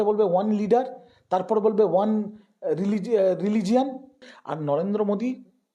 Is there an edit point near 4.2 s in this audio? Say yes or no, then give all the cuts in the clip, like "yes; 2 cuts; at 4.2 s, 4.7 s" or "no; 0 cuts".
yes; 1 cut; at 4.2 s